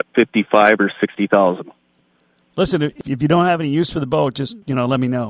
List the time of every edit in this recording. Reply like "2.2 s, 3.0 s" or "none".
2.9 s